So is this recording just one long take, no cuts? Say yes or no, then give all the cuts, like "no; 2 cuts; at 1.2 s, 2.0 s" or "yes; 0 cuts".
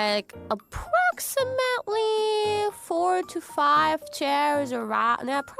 yes; 0 cuts